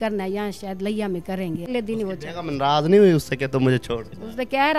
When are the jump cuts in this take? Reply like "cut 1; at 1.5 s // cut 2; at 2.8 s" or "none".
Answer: cut 1; at 1.7 s

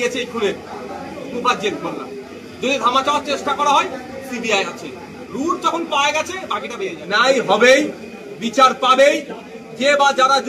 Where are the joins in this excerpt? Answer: cut 1; at 7.0 s

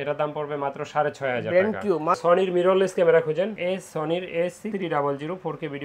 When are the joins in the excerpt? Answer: cut 1; at 2.2 s

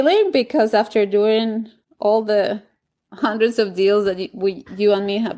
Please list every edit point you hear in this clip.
none

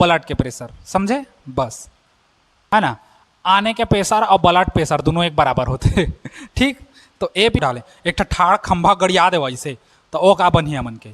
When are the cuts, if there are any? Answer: cut 1; at 2.7 s // cut 2; at 7.6 s

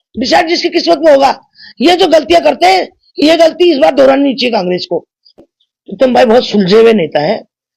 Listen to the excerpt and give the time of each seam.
cut 1; at 5.3 s

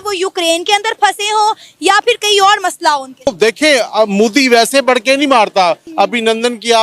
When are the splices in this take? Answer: cut 1; at 3.3 s // cut 2; at 5.8 s

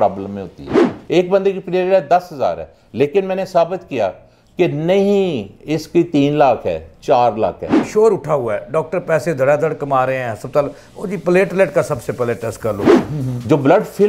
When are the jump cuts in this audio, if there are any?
cut 1; at 1.0 s // cut 2; at 7.7 s // cut 3; at 12.9 s

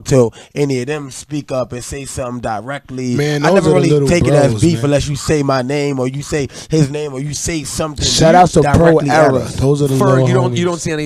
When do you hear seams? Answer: cut 1; at 4.6 s

